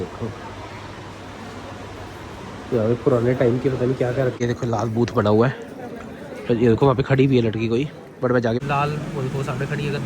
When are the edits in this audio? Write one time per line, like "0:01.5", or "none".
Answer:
0:04.3
0:08.6

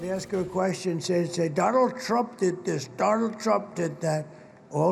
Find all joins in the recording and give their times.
none

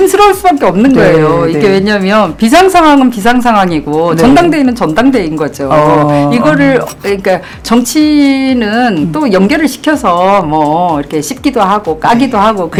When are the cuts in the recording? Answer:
none

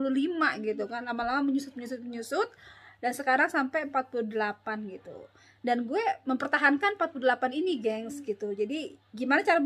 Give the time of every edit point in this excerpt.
none

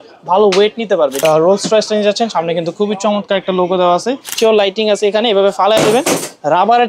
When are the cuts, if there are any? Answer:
0:01.2
0:04.4

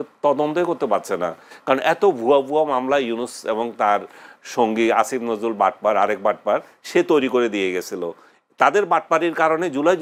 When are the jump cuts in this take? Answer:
none

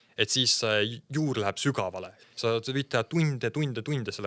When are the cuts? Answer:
0:02.1

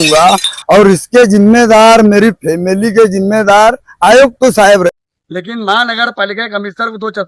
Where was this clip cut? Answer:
0:04.9

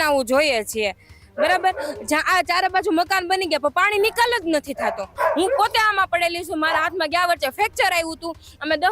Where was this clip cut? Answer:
0:05.1

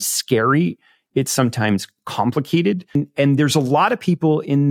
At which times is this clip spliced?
0:03.0

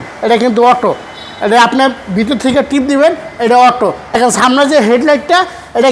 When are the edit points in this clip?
0:04.2

